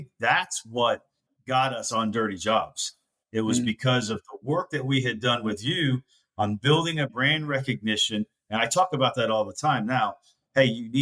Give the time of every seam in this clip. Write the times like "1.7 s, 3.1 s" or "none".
1.5 s